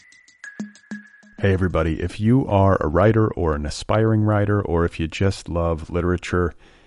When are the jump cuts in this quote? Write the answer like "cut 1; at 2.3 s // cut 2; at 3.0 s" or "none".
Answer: cut 1; at 0.9 s